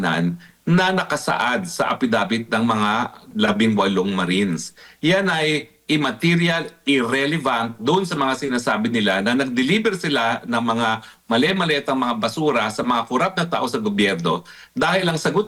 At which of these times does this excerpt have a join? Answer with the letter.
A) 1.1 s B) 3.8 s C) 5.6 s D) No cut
D